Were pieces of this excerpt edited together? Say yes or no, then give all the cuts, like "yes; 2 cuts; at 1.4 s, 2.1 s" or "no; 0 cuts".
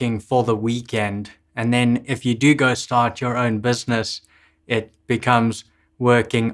no; 0 cuts